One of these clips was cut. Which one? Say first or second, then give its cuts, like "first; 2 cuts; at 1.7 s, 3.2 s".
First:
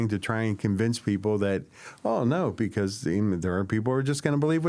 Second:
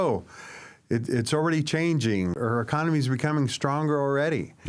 second; 1 cut; at 2.4 s